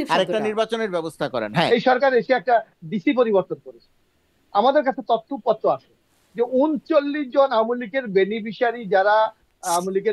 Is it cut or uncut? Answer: cut